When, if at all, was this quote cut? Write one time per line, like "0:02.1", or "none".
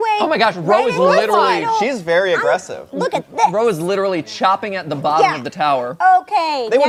none

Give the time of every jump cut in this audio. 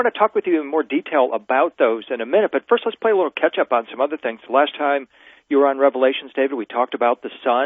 0:03.4

